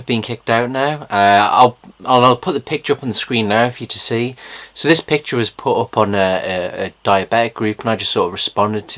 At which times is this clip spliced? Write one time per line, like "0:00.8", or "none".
none